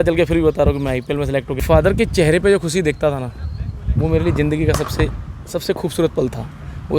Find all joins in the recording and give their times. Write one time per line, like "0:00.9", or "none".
0:01.6